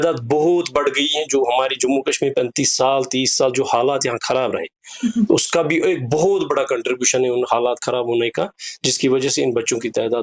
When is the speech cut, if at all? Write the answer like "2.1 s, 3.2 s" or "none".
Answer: none